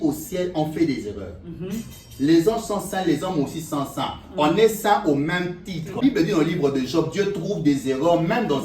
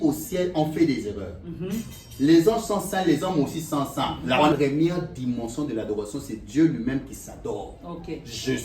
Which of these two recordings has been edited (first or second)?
second